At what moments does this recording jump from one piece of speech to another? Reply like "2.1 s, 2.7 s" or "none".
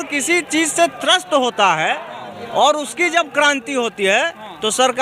none